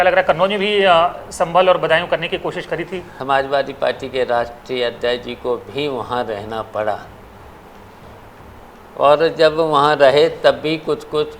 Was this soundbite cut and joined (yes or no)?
yes